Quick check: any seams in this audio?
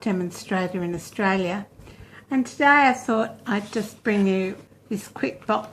yes; 1 cut; at 4.7 s

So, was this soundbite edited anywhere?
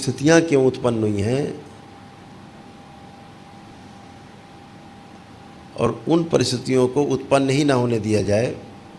no; 0 cuts

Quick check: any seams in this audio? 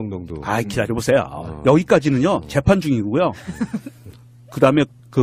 no; 0 cuts

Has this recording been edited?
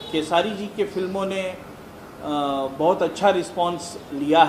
no; 0 cuts

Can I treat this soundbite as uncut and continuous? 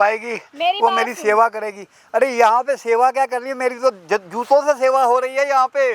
yes; 0 cuts

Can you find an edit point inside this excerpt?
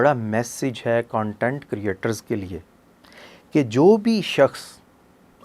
no; 0 cuts

